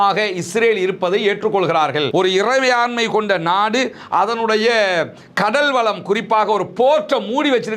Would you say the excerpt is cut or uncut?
cut